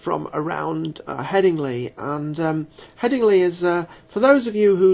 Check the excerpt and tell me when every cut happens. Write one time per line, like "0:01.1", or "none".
0:03.0